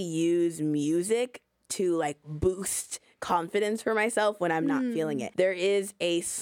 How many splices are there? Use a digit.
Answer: 1